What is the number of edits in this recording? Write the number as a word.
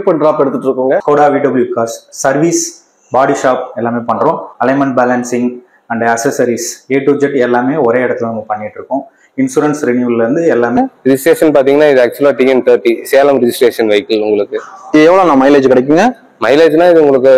two